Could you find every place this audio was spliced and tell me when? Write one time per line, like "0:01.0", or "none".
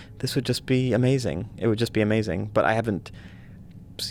none